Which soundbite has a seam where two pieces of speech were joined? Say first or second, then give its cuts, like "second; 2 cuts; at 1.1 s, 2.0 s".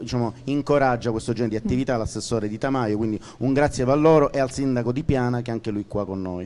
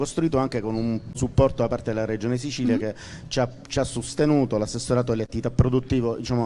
second; 1 cut; at 1.2 s